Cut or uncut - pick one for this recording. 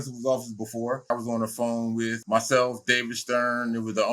cut